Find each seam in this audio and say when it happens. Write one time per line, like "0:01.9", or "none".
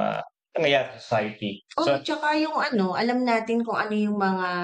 none